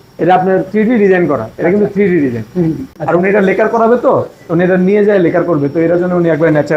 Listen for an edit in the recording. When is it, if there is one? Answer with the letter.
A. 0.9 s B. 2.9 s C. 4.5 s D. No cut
B